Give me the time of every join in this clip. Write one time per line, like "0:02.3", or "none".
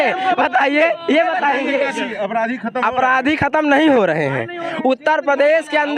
0:02.1